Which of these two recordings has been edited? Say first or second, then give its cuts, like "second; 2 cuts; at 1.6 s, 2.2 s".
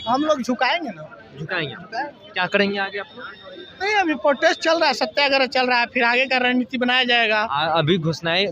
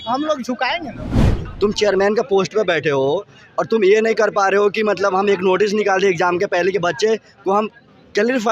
second; 1 cut; at 1.4 s